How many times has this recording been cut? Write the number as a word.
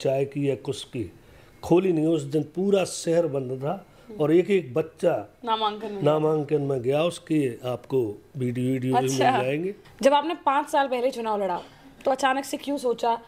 one